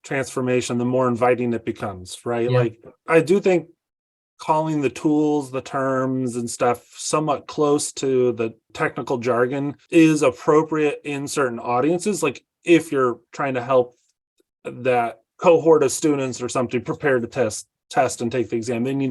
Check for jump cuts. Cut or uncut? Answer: cut